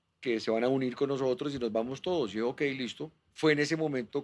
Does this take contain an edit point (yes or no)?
yes